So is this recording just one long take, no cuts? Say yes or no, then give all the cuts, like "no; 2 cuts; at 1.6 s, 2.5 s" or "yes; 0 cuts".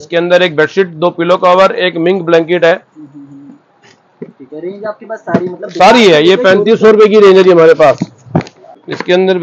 yes; 0 cuts